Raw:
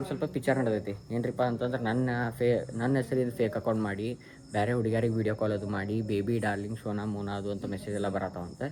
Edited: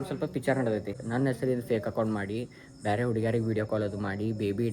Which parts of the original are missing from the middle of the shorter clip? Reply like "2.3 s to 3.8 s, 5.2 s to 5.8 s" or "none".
1.0 s to 2.7 s